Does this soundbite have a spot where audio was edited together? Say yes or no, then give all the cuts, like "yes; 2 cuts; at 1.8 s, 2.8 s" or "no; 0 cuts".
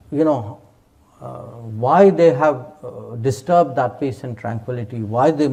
no; 0 cuts